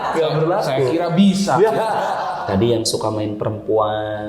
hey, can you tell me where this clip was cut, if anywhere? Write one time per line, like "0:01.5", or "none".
0:02.2